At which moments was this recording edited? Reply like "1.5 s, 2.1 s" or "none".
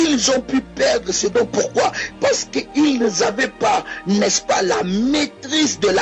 2.1 s

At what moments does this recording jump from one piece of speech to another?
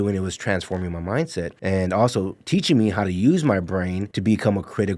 1.5 s, 4.1 s

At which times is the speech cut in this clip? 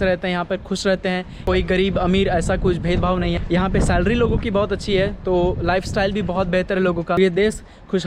1.3 s, 7.2 s

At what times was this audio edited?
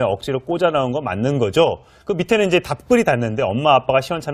none

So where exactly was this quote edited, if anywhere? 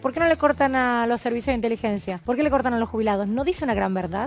2.1 s

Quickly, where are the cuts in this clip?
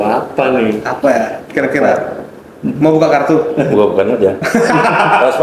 none

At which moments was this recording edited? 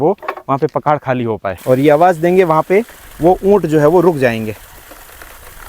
1.5 s

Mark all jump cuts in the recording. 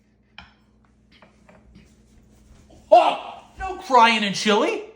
3.8 s

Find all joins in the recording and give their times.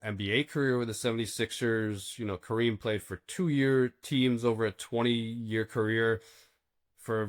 none

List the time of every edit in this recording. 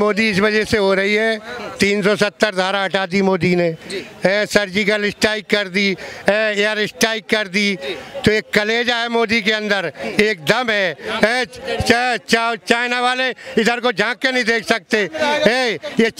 none

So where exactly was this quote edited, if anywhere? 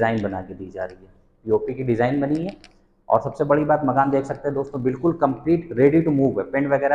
none

